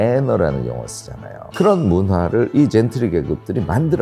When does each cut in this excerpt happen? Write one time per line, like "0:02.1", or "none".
0:01.4